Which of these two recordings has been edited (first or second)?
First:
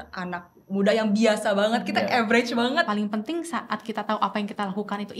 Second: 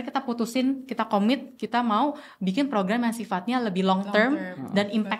first